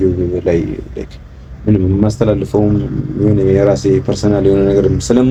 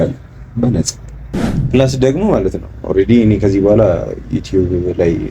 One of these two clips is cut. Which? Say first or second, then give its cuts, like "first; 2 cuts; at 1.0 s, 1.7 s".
second; 1 cut; at 1.5 s